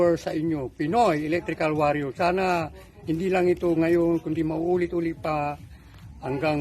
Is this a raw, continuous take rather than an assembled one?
yes; 0 cuts

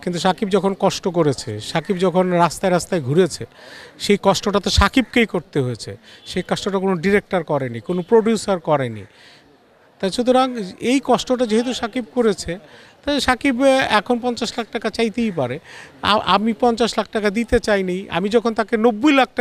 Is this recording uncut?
yes; 0 cuts

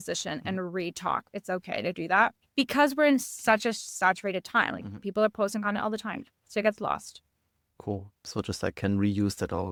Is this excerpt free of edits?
yes; 0 cuts

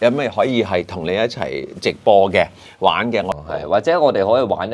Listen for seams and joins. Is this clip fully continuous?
no; 1 cut; at 3.3 s

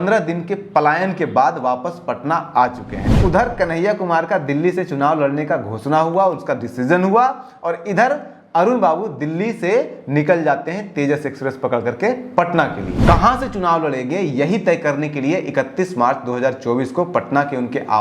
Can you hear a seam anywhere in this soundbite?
yes; 2 cuts; at 3.1 s, 12.9 s

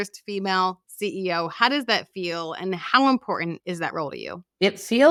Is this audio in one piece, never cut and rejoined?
yes; 0 cuts

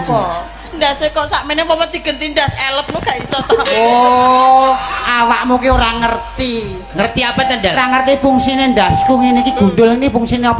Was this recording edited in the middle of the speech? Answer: no; 0 cuts

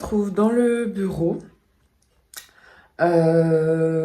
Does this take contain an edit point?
no; 0 cuts

